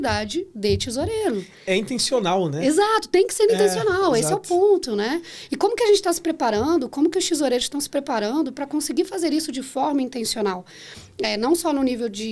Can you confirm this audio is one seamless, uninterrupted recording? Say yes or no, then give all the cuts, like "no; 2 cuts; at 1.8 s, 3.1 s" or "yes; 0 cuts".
yes; 0 cuts